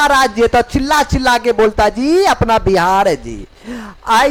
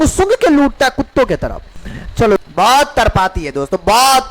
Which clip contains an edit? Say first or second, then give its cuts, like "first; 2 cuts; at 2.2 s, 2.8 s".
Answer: second; 1 cut; at 2.4 s